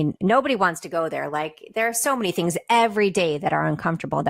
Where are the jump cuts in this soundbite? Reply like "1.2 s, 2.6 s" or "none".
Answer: none